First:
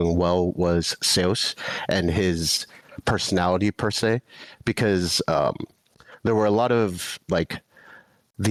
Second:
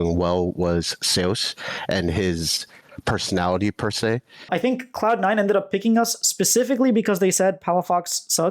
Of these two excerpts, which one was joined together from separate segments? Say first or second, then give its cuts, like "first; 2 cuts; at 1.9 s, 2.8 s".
second; 1 cut; at 4.5 s